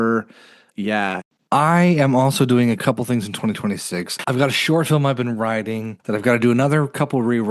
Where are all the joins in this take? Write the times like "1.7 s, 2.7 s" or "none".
1.2 s, 4.1 s, 5.9 s